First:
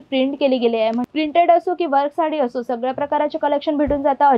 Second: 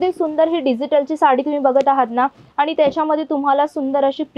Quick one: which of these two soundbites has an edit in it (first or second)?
first